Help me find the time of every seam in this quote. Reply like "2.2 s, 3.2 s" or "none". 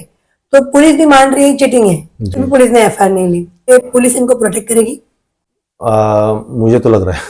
3.7 s